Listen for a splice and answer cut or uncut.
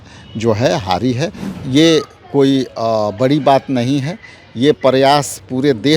cut